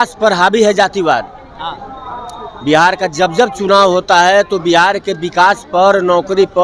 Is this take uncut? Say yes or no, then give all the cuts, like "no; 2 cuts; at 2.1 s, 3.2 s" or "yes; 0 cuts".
yes; 0 cuts